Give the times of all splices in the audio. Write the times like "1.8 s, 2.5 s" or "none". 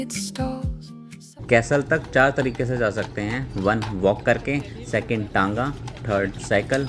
1.2 s